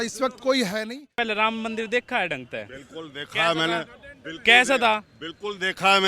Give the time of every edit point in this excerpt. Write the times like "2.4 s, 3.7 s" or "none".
1.1 s